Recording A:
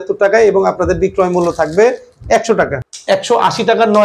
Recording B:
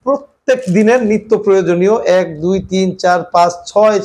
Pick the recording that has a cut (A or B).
A